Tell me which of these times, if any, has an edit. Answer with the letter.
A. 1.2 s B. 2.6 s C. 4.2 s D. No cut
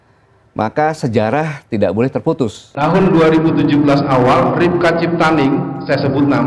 B